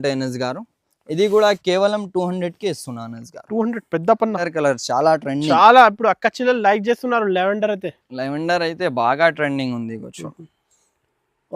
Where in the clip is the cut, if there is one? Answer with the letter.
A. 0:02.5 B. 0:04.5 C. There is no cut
B